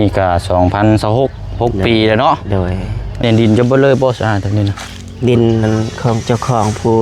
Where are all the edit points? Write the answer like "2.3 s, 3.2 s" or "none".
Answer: 3.2 s